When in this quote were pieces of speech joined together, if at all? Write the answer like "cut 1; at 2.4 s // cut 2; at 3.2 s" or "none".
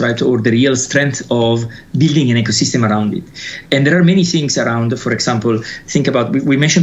none